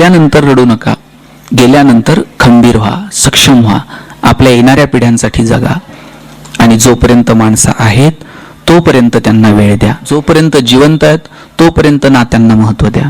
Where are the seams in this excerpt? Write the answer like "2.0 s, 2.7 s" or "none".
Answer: 10.1 s